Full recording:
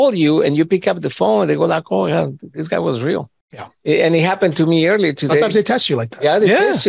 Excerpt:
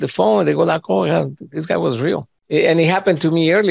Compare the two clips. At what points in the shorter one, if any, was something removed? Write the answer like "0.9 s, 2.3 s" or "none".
2.3 s